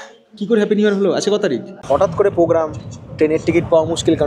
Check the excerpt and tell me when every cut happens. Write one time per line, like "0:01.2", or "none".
0:01.8